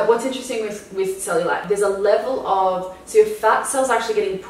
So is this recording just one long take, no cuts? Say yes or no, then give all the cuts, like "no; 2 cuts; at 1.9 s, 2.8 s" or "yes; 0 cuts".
no; 1 cut; at 1.6 s